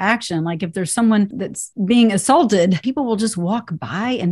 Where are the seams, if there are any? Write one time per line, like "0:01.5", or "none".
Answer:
0:01.5
0:02.8